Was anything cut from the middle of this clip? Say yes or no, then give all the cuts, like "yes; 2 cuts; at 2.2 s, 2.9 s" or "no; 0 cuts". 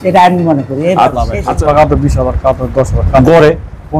yes; 1 cut; at 1.5 s